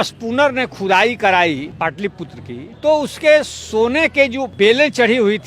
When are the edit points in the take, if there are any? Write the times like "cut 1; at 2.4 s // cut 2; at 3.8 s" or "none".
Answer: cut 1; at 2.1 s // cut 2; at 4.4 s